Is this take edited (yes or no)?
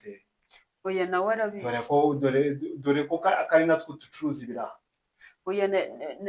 yes